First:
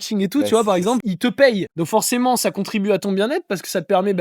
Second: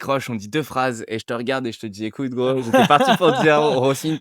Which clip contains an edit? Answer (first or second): first